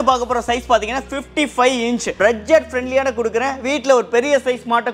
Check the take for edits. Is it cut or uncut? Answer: cut